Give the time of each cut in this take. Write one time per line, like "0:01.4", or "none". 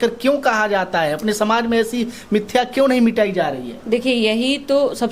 none